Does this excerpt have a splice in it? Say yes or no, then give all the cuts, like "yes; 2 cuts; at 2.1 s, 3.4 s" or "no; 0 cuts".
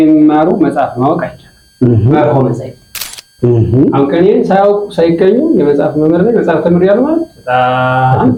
no; 0 cuts